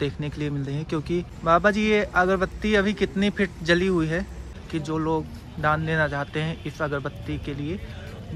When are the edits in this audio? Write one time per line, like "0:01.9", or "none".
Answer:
0:01.3
0:04.6